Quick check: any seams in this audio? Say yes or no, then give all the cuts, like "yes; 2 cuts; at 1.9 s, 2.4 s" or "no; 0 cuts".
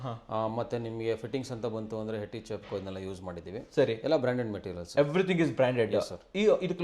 no; 0 cuts